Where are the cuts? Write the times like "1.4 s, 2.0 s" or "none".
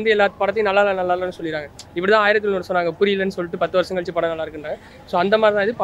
none